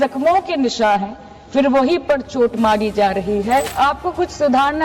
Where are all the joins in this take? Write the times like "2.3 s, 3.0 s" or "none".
3.7 s